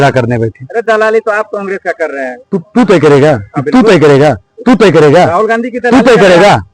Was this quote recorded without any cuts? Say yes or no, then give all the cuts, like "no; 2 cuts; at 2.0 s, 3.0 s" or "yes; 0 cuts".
no; 1 cut; at 2.4 s